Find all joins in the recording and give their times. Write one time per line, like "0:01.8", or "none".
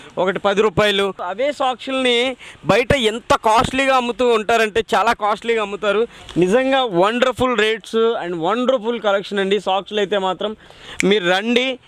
0:01.2
0:06.2